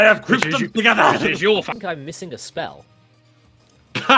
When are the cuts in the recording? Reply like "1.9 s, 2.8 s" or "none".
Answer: 1.8 s